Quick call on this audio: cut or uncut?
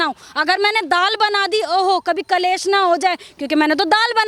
uncut